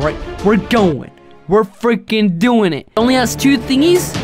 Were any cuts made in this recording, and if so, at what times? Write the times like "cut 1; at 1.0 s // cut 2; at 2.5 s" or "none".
cut 1; at 2.9 s